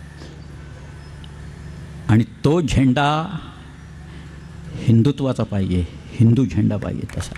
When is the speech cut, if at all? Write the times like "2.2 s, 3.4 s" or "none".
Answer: none